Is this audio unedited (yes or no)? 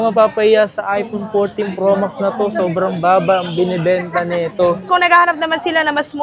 no